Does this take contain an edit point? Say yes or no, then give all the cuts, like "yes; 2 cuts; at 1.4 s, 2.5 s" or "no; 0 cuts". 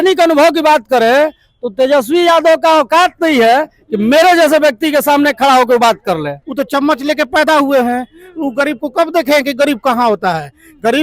yes; 1 cut; at 6.4 s